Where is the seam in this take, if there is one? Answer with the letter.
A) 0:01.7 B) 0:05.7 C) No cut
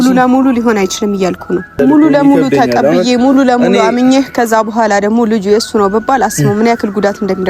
A